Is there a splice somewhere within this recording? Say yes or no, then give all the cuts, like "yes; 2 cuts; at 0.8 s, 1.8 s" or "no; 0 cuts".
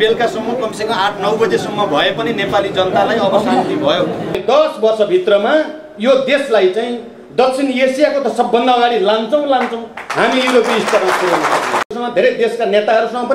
yes; 2 cuts; at 4.4 s, 11.9 s